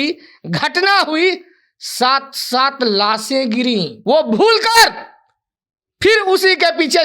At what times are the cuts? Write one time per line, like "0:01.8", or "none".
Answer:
0:03.9